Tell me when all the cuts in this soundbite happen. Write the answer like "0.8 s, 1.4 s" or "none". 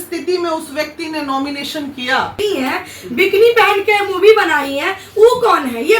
2.4 s